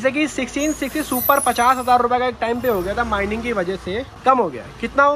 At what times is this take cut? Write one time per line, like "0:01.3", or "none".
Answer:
none